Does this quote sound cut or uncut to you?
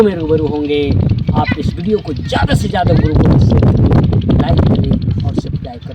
uncut